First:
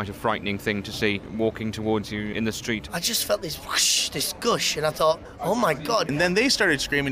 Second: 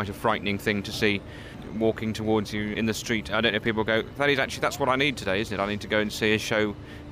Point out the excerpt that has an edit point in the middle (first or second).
first